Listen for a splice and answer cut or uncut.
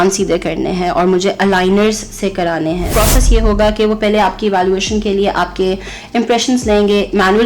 cut